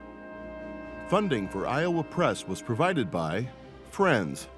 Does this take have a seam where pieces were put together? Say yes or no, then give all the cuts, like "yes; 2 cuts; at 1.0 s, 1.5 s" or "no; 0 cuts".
yes; 1 cut; at 1.1 s